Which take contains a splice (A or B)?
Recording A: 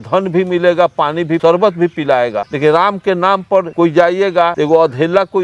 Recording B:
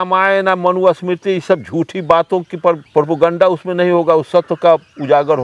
A